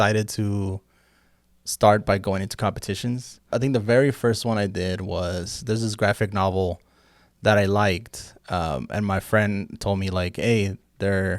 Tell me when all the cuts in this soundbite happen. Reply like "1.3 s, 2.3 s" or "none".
3.6 s